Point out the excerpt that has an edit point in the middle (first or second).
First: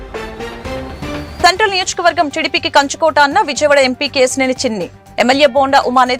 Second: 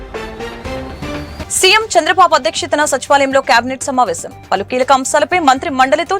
second